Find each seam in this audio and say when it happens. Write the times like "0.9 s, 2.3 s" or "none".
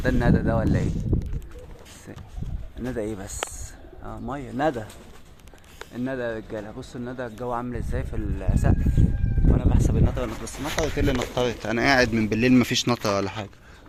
none